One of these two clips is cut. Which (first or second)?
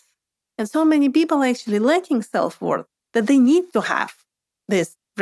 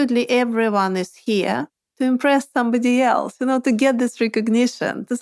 second